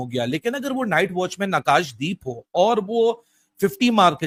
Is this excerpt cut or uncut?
uncut